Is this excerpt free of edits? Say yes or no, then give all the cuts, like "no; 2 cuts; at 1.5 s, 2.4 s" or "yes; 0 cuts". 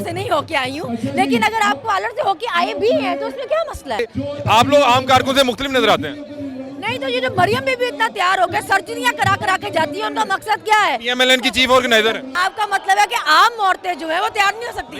no; 2 cuts; at 4.0 s, 12.3 s